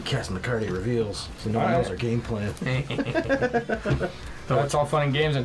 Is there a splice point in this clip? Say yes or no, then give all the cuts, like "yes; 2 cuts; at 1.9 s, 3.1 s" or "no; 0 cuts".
no; 0 cuts